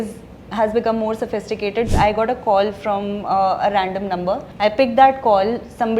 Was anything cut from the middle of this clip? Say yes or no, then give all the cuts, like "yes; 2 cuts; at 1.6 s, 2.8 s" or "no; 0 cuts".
yes; 2 cuts; at 1.9 s, 4.5 s